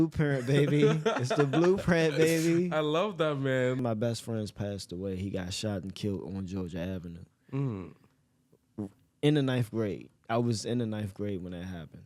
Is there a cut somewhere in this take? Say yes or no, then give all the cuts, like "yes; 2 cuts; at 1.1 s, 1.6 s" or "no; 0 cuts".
yes; 1 cut; at 3.8 s